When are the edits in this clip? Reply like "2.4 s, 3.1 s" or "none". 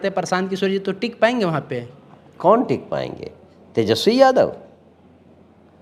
none

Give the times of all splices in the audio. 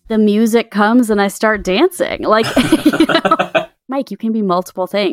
3.9 s

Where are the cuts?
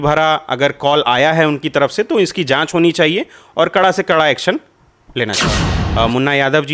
5.8 s

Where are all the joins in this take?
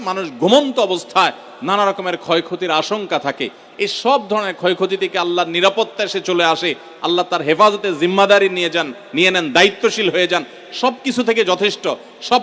none

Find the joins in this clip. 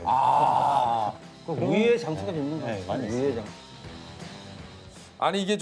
none

